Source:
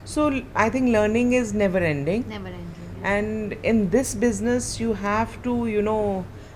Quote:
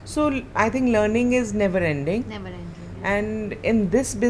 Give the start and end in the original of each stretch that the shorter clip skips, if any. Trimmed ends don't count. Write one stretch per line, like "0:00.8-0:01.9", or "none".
none